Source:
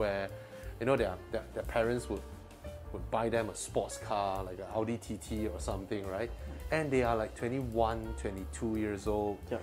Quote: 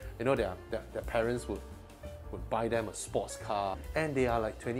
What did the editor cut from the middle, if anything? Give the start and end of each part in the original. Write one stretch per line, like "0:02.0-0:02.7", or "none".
0:04.4-0:06.6